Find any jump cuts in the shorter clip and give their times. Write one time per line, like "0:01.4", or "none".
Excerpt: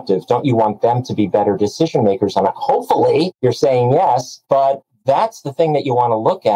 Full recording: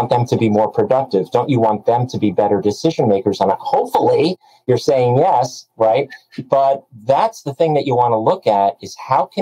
0:03.3
0:04.3